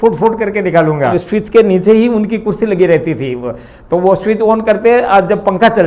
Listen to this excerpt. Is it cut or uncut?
cut